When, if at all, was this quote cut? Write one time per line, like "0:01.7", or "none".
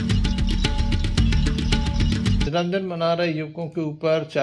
0:01.4
0:02.5